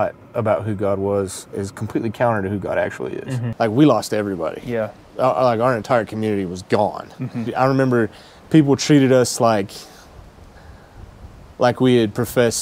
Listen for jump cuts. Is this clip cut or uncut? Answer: cut